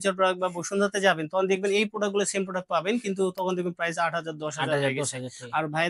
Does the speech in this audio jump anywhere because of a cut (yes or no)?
no